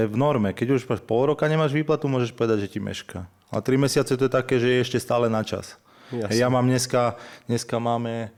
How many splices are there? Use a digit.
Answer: 0